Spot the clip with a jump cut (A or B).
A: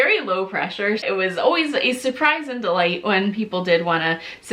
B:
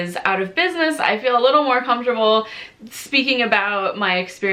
A